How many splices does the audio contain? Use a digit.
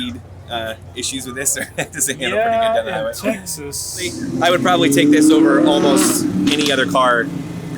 1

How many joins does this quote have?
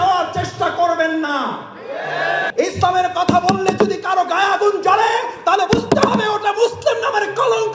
1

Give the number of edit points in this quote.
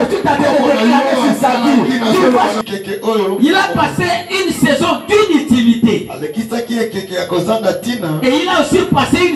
1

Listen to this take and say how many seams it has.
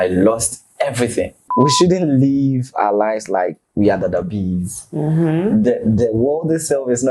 1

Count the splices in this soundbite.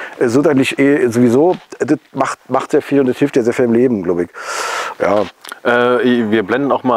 0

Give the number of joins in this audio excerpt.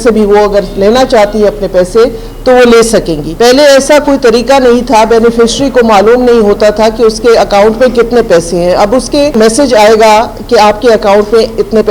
2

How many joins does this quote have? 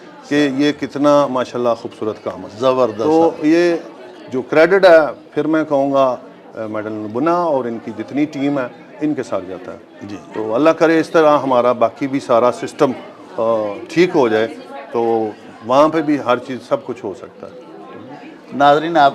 0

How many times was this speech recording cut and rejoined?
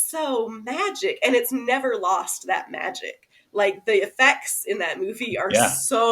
0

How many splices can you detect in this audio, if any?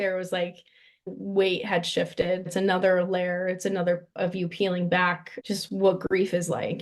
3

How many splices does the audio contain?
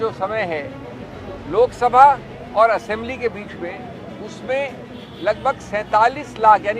1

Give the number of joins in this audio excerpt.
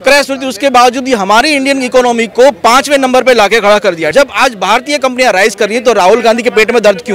1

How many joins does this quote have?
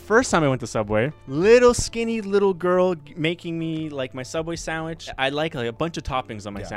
2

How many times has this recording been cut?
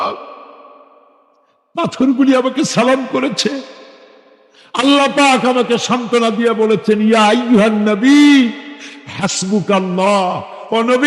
0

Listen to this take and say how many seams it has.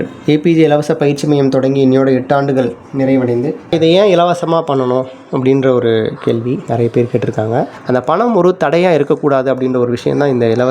2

